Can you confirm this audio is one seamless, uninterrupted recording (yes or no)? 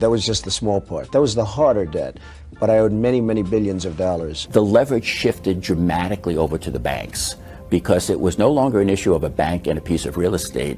no